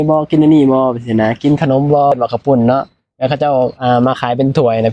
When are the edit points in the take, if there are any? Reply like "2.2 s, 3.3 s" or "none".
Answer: 2.1 s